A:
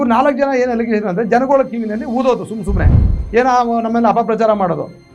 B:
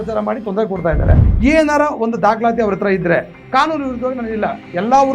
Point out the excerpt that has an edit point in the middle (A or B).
B